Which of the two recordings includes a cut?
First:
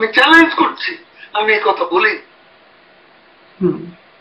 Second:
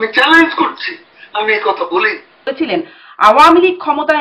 second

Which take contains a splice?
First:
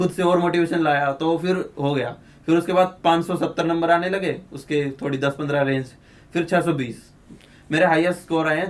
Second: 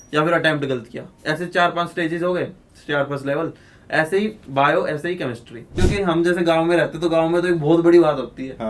second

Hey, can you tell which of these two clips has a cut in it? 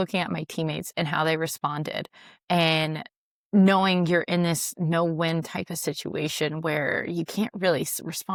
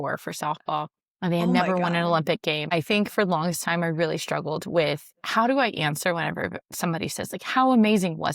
second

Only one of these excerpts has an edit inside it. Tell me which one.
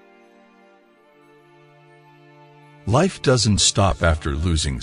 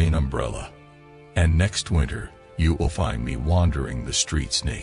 first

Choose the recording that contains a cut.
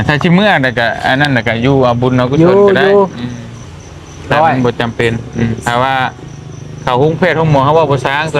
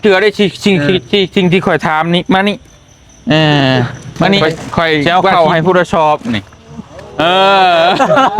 second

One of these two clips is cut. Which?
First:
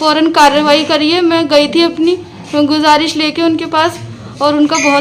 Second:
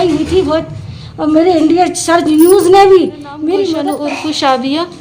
second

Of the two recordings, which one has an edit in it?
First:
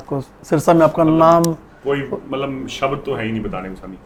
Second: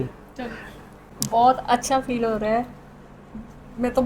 second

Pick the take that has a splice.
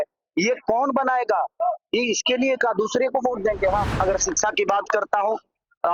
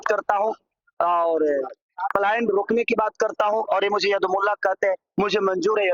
first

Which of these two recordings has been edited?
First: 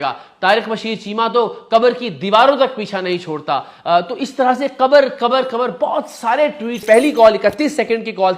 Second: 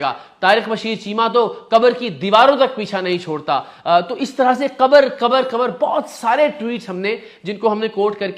first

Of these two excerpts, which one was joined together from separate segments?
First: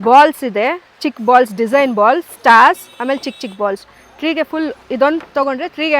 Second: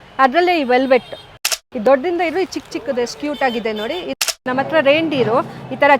second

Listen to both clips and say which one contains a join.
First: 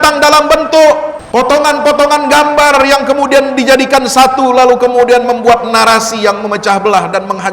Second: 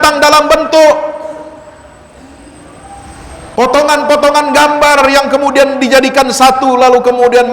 first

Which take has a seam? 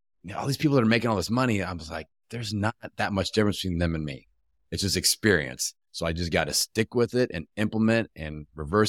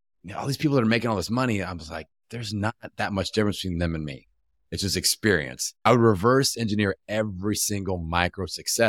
second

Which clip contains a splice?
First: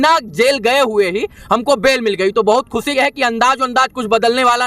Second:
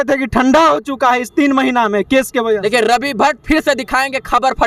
first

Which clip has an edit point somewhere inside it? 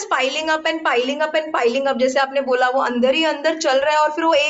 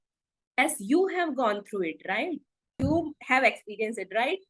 second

